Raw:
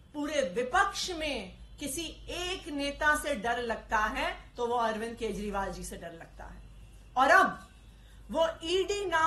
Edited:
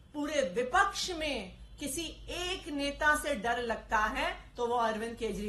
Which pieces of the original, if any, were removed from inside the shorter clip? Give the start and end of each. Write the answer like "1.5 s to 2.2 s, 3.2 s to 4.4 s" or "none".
none